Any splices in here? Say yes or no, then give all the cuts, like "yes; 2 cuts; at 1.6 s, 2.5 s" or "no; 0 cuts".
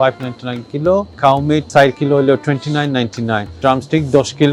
yes; 2 cuts; at 1.4 s, 3.6 s